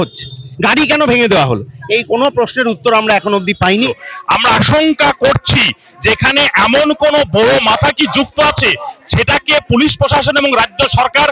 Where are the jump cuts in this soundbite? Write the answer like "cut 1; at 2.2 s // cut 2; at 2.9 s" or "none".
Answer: cut 1; at 4.0 s